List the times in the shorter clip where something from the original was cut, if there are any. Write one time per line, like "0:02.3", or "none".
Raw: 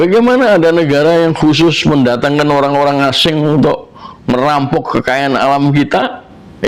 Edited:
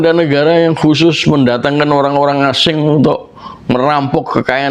none